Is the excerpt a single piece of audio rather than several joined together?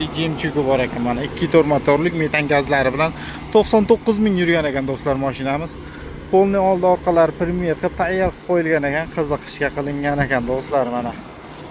yes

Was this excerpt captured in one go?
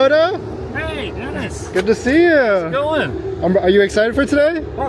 yes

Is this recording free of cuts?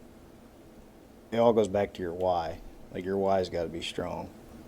no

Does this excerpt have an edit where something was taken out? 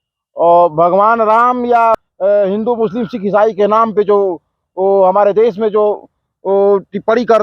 yes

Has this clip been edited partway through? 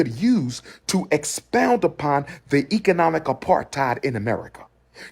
no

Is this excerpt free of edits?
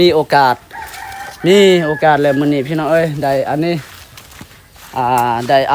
yes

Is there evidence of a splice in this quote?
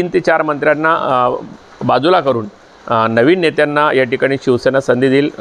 no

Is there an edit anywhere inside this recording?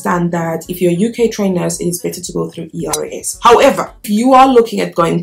yes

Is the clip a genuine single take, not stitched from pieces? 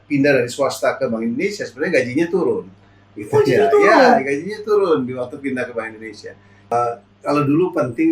no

